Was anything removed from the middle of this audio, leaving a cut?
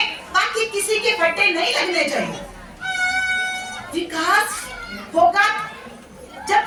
no; 0 cuts

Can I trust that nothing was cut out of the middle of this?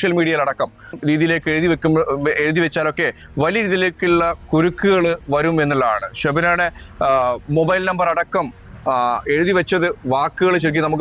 no; 1 cut; at 0.9 s

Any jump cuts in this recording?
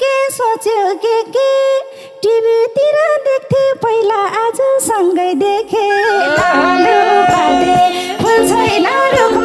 no; 0 cuts

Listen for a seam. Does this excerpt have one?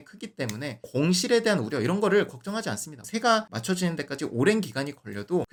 no; 0 cuts

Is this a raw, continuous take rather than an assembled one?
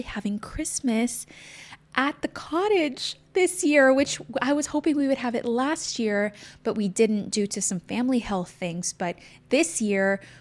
yes; 0 cuts

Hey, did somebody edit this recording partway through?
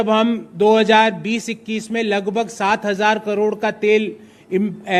no; 0 cuts

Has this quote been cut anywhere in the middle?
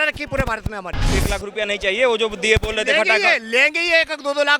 yes; 1 cut; at 1.2 s

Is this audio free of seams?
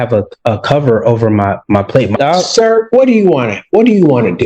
no; 1 cut; at 2.2 s

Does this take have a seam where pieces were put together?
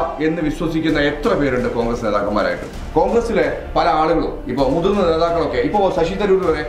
yes; 1 cut; at 2.7 s

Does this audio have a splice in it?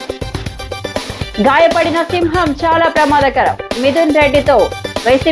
no; 0 cuts

